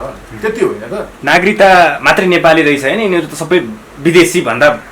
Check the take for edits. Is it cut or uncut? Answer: cut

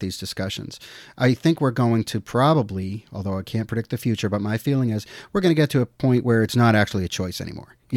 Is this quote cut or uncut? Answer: cut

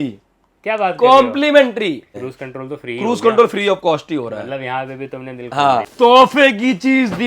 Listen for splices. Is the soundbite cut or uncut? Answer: cut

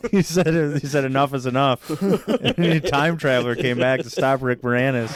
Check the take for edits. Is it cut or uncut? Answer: uncut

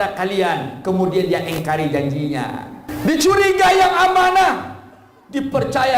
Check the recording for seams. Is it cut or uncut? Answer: cut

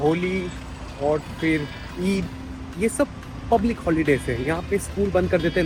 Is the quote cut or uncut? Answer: uncut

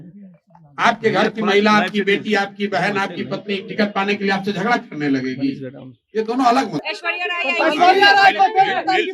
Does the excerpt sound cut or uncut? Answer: cut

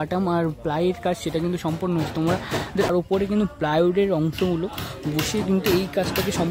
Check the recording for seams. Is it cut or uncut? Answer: cut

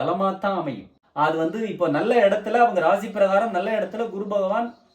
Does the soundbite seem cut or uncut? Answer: cut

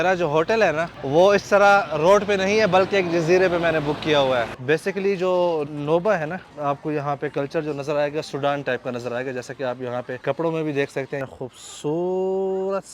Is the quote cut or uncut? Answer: cut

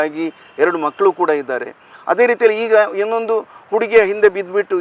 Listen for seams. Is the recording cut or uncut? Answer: uncut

